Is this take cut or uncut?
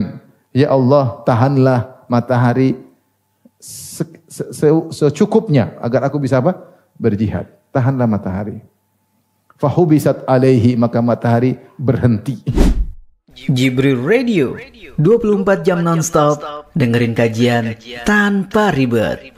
cut